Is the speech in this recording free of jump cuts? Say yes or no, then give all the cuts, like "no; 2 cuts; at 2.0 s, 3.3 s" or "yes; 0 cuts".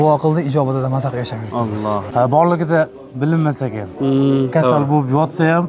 no; 1 cut; at 2.0 s